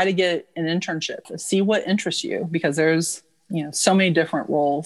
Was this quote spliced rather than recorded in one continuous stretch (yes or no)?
yes